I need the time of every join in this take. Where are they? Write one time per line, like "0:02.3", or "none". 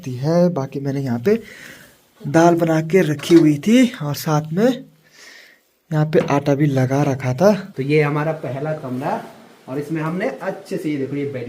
0:07.7